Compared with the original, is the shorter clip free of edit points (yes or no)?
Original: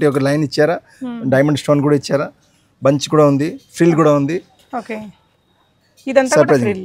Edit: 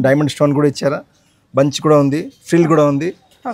yes